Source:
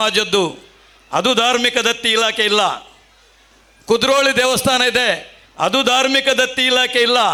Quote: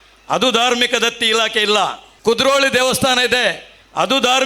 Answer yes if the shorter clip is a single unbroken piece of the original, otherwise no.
no